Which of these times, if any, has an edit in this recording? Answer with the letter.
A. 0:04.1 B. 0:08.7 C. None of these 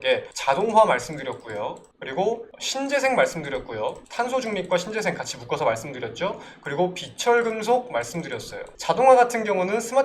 B